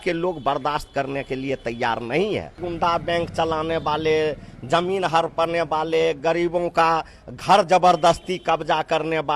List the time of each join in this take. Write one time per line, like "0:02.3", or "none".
0:02.6